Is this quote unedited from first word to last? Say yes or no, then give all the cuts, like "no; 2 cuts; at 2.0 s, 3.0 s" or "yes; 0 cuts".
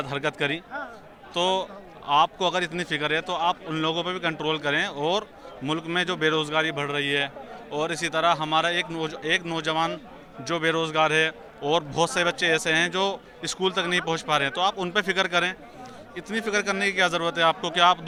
yes; 0 cuts